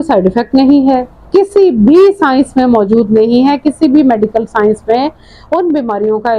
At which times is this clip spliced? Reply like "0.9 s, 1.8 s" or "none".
1.1 s